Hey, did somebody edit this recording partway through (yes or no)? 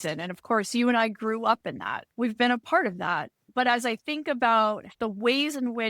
yes